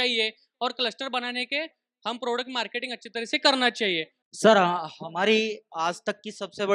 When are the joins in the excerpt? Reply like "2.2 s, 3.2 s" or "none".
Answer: 4.2 s